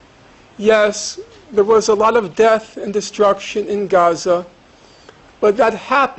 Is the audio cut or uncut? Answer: uncut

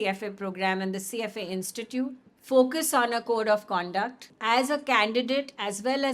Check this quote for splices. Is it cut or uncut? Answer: cut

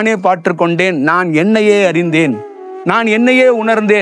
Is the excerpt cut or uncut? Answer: uncut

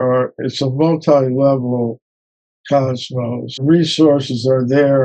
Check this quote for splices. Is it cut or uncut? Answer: cut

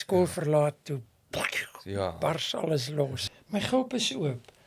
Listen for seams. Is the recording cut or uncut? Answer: cut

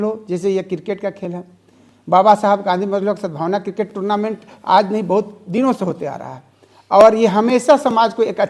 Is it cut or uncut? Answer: uncut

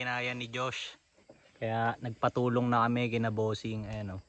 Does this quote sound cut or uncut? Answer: uncut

